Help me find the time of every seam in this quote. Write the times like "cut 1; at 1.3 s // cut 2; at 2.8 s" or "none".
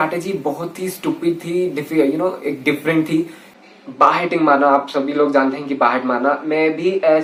none